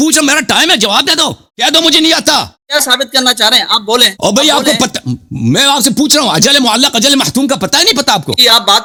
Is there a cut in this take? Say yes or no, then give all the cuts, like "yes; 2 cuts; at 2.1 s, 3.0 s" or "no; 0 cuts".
no; 0 cuts